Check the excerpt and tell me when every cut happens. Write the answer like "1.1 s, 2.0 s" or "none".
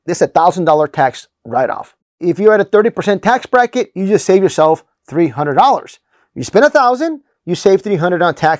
2.1 s